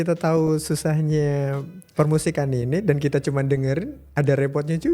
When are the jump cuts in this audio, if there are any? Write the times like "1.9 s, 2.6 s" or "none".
none